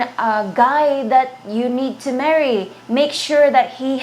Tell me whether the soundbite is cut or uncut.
uncut